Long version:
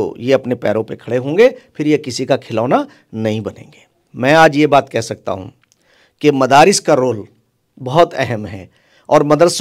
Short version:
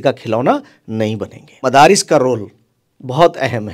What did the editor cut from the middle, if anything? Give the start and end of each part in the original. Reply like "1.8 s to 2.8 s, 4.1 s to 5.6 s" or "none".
3.9 s to 6.4 s